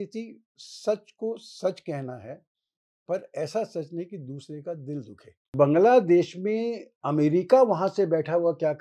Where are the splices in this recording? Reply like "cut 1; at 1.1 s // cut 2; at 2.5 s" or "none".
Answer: cut 1; at 5.5 s